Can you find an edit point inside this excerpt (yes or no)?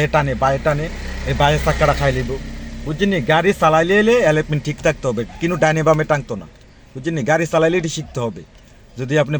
no